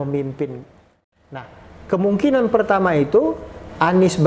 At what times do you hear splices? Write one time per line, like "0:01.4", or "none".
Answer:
0:01.0